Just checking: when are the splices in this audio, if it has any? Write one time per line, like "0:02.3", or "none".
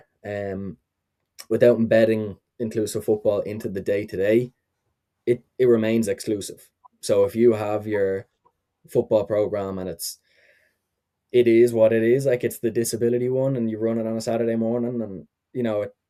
none

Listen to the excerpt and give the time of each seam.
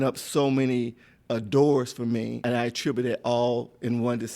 0:02.4

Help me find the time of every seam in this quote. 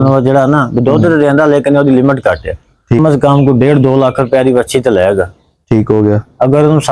0:03.0

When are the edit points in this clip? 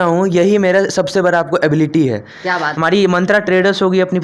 0:02.7

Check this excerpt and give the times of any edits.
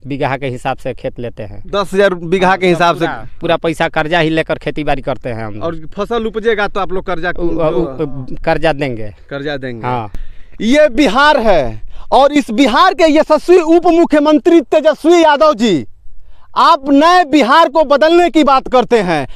none

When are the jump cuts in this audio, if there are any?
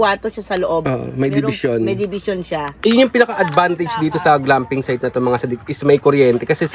0:02.7

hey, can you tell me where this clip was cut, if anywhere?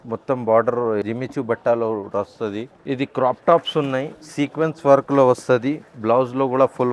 0:01.0
0:02.7

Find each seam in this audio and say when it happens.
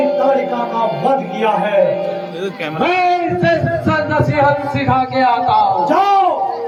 none

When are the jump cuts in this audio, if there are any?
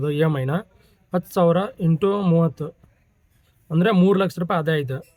none

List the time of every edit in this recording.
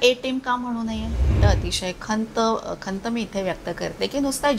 0:01.3

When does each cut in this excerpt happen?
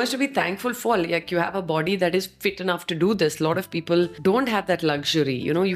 0:04.1

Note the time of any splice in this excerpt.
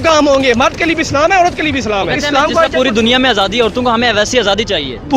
0:02.1

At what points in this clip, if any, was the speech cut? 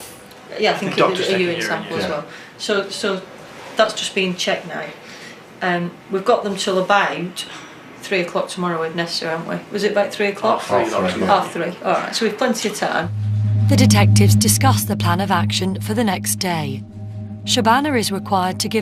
0:15.9

